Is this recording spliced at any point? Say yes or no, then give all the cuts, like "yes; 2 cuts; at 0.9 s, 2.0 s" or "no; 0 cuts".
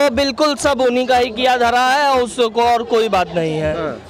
no; 0 cuts